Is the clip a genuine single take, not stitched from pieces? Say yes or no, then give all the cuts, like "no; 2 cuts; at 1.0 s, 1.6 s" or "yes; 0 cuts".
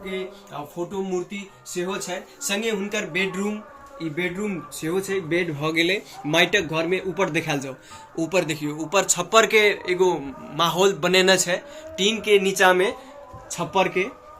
yes; 0 cuts